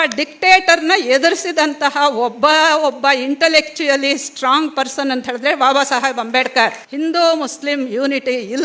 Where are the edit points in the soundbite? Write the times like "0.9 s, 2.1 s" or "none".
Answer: 6.8 s